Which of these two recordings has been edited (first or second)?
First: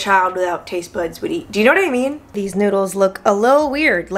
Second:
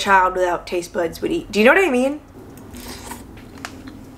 first